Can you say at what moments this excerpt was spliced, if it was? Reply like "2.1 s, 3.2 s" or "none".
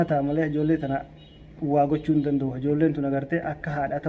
none